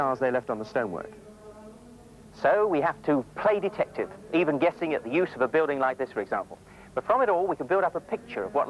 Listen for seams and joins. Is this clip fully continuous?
yes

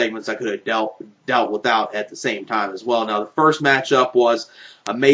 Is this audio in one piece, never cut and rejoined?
yes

